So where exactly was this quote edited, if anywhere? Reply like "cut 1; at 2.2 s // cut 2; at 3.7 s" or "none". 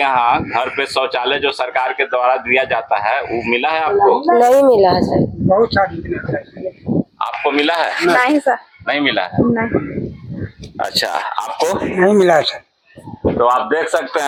none